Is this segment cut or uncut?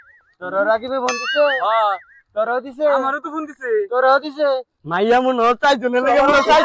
uncut